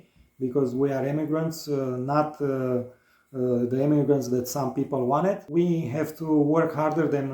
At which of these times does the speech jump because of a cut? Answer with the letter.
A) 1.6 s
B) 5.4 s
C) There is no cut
B